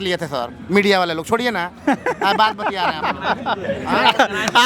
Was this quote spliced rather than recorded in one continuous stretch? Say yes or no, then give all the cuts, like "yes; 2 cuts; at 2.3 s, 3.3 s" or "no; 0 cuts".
no; 0 cuts